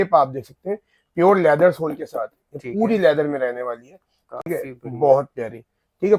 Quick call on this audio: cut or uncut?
uncut